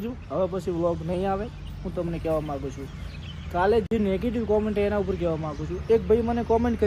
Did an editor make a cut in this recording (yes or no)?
no